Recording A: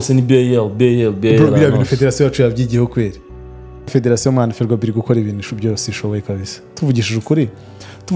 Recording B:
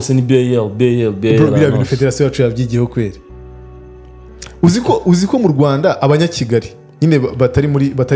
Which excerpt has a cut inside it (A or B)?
A